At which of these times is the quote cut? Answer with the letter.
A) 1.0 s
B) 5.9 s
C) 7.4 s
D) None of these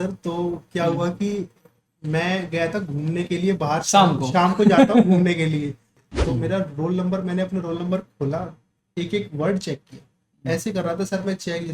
B